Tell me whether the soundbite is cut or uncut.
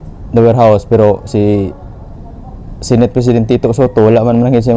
uncut